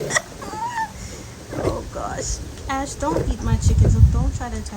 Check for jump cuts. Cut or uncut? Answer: uncut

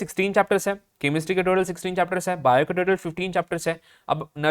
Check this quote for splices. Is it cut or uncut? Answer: uncut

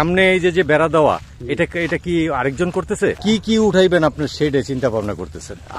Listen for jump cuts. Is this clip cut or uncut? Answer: cut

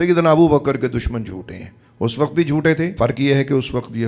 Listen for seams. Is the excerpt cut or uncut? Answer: cut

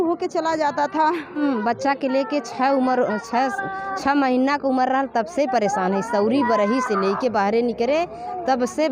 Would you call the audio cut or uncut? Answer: cut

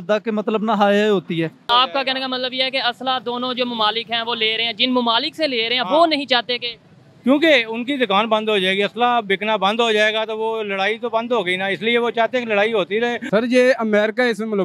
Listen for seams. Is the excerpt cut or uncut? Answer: cut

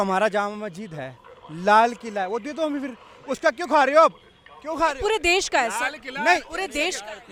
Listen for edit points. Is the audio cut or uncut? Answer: uncut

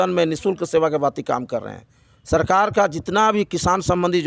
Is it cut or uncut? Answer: uncut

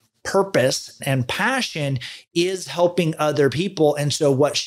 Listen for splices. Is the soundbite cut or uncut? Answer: cut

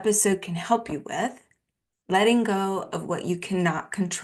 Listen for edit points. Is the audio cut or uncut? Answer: uncut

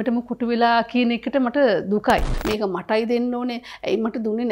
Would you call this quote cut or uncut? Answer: cut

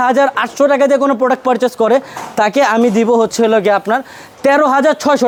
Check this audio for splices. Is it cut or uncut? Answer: uncut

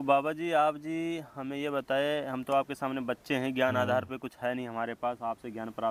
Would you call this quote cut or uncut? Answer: uncut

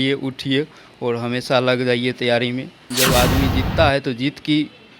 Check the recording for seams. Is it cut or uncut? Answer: cut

